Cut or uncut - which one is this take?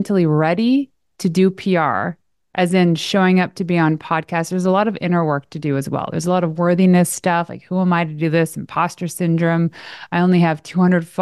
uncut